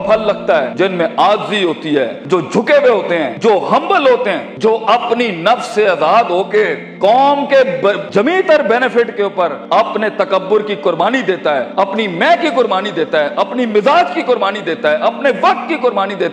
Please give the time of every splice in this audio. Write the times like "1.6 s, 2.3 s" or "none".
none